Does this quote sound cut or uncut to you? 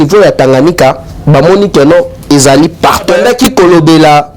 cut